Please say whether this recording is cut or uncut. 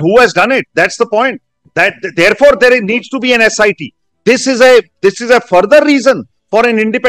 uncut